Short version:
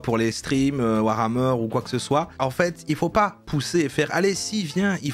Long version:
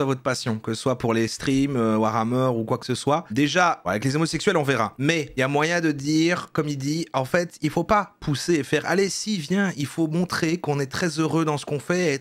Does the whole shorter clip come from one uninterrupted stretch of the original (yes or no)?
no